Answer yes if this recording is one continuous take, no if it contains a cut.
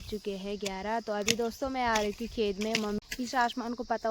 no